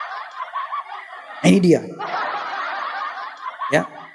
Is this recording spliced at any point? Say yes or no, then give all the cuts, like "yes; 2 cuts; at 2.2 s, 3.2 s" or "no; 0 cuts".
no; 0 cuts